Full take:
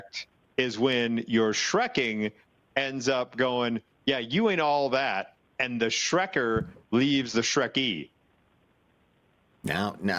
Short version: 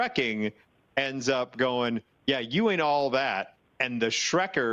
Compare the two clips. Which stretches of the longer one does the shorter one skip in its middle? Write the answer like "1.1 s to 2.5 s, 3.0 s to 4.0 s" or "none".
none